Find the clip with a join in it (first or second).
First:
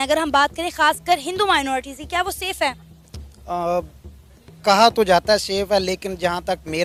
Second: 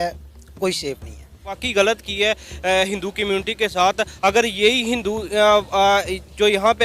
second